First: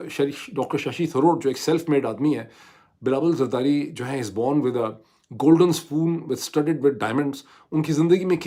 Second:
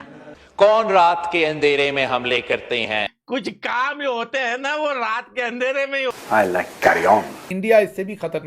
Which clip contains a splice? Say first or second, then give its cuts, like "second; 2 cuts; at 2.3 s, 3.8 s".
second; 3 cuts; at 3.1 s, 6.1 s, 7.4 s